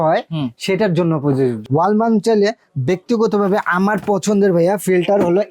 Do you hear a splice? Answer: yes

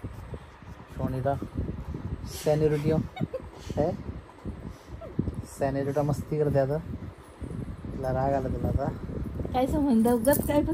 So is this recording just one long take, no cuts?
yes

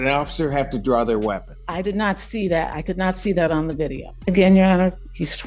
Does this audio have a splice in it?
yes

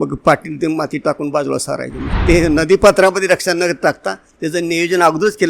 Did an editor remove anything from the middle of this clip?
yes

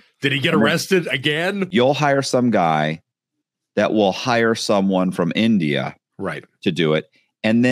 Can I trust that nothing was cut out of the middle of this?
no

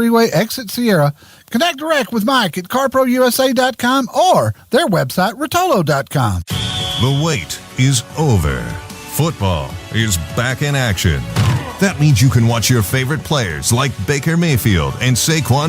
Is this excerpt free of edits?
no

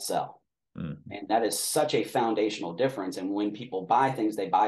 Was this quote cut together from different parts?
no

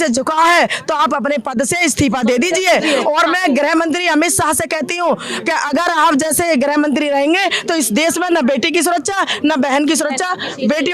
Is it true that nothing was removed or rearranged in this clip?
yes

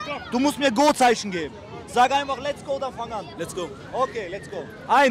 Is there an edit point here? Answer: no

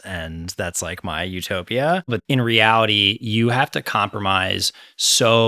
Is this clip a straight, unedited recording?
no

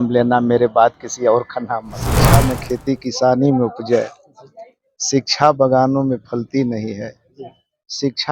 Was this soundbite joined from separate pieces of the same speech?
yes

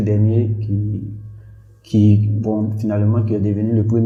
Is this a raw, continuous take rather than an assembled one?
yes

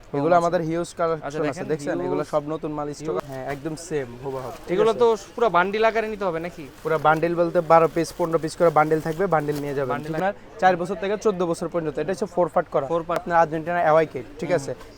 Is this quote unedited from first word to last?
no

